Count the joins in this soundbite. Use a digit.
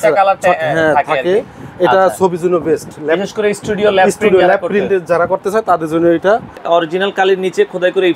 1